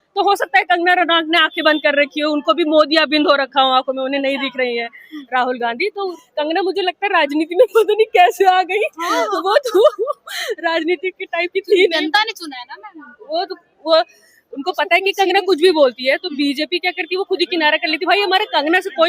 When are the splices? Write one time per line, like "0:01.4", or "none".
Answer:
0:06.2
0:13.2